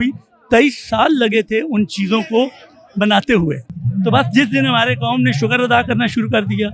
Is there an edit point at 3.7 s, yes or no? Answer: yes